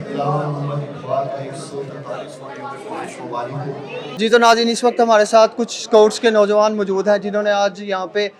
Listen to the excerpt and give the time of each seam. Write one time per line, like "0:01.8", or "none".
none